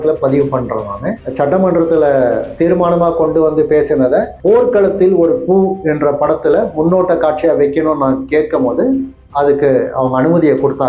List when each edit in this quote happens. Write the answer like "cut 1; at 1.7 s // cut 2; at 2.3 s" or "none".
cut 1; at 1.1 s